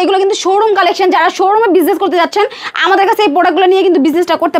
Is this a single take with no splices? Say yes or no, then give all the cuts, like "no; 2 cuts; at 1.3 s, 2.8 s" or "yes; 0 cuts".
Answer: yes; 0 cuts